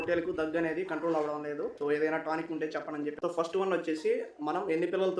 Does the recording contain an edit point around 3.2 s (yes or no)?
yes